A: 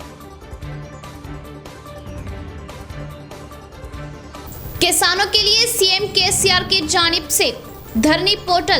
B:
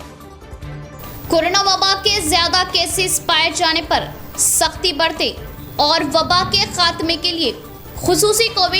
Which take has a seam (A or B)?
A